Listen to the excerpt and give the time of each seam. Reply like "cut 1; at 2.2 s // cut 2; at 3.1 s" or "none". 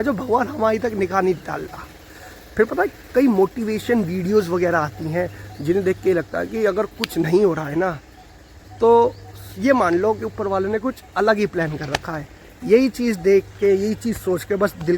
none